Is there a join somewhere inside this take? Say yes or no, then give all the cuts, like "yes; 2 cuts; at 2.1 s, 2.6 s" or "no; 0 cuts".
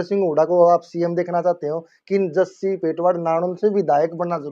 no; 0 cuts